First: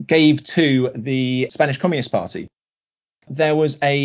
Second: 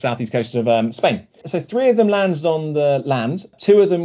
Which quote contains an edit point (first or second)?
first